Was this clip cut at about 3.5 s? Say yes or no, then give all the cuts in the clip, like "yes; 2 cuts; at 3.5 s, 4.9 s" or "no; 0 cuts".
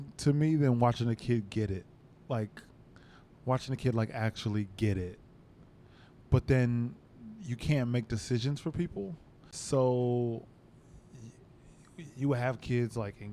no; 2 cuts; at 2.0 s, 9.5 s